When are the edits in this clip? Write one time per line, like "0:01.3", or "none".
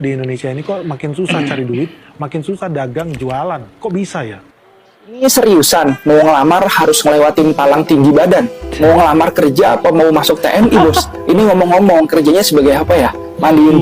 0:04.4

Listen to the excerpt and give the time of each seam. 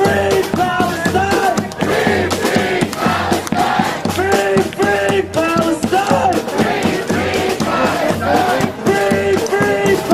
0:05.0

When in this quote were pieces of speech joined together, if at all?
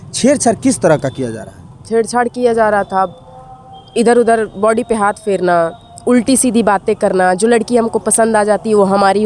none

